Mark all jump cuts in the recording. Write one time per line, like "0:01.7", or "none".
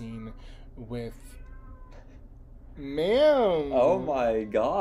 none